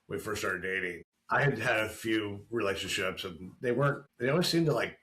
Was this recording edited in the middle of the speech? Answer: yes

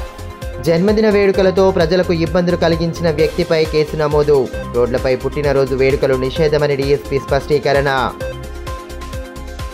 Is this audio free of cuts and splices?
yes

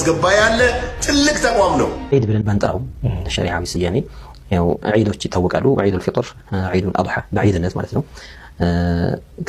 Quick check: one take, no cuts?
no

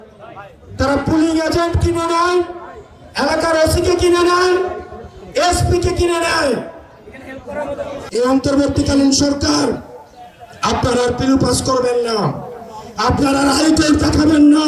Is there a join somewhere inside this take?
yes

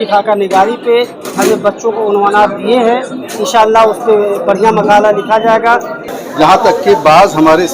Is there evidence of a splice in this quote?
yes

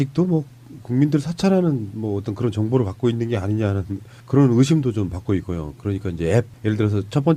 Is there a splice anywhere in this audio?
no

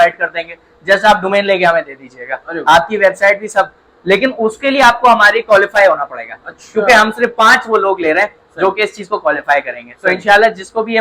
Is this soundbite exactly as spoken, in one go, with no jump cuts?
yes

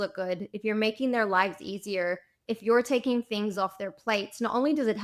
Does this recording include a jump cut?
no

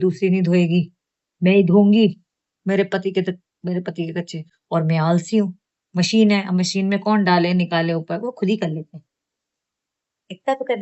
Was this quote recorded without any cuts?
yes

